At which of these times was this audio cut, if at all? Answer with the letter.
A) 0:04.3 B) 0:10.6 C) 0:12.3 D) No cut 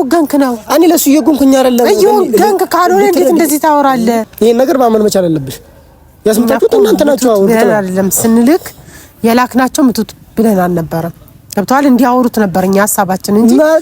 A